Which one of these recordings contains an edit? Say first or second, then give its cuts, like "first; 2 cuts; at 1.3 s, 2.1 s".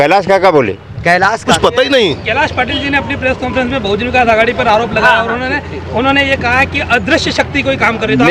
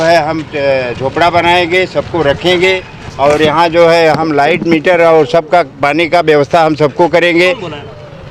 first; 1 cut; at 1.5 s